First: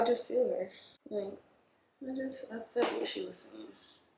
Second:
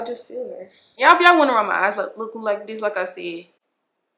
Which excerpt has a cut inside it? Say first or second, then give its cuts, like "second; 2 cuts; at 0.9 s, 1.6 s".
second; 1 cut; at 0.9 s